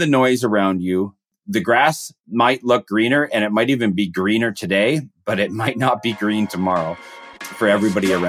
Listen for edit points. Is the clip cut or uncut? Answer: cut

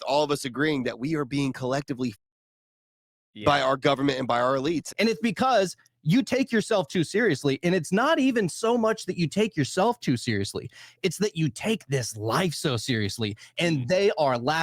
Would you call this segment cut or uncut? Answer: cut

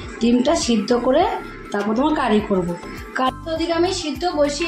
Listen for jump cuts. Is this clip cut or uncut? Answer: cut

